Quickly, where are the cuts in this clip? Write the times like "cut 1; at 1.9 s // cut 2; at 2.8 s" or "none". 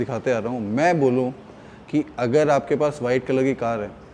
none